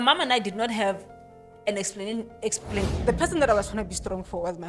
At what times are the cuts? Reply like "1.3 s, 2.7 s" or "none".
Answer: 2.7 s